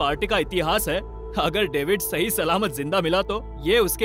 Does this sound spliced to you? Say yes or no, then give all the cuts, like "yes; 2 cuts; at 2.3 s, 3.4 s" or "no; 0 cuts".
no; 0 cuts